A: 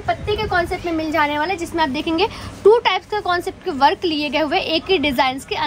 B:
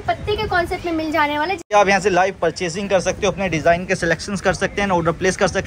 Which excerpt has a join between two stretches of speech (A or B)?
B